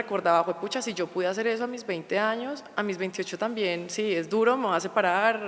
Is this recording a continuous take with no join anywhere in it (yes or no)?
yes